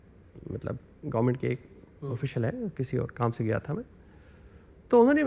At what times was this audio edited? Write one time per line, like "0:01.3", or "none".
none